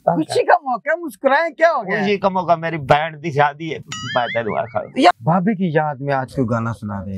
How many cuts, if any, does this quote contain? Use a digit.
1